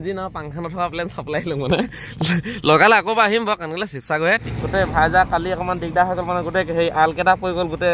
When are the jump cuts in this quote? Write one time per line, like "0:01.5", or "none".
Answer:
0:04.4